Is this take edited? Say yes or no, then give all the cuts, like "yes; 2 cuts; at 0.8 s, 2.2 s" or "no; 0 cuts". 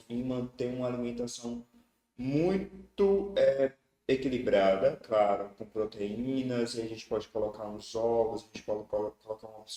no; 0 cuts